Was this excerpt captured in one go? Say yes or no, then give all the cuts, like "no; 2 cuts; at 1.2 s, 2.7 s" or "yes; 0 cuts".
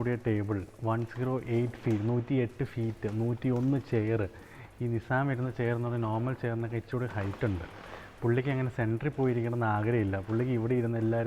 yes; 0 cuts